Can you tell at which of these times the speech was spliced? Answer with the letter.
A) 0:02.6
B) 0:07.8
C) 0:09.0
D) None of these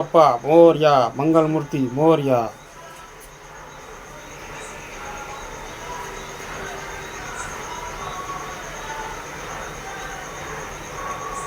D